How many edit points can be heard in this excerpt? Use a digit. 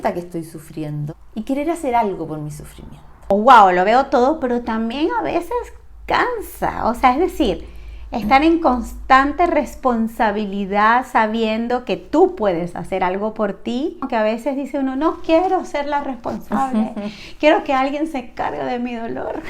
3